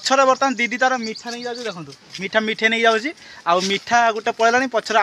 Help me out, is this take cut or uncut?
uncut